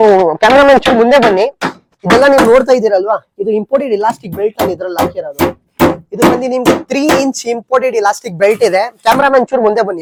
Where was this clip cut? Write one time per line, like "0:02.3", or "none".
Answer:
none

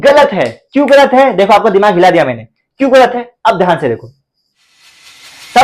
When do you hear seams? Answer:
none

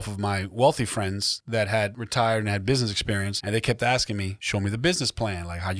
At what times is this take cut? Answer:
0:01.3
0:02.0
0:03.3
0:04.4

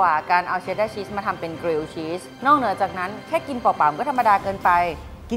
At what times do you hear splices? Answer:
0:02.3

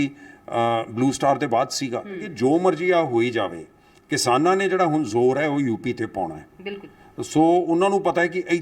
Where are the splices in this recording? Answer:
0:02.3

